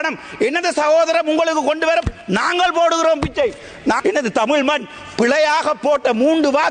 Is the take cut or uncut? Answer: cut